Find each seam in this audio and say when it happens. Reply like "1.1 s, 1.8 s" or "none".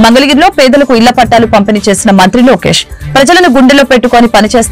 none